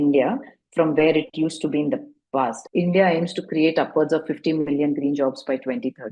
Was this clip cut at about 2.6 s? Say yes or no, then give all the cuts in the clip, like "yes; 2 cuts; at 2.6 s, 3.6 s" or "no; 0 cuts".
yes; 1 cut; at 2.6 s